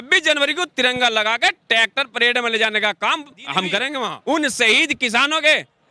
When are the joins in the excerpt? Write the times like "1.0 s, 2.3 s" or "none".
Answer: 4.1 s